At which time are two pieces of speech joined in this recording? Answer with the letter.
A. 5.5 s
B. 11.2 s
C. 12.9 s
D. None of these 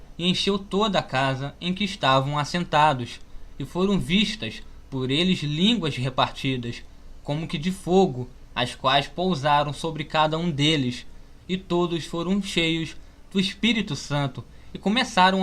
A